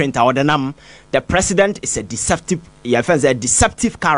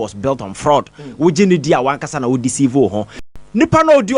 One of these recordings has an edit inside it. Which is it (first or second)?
second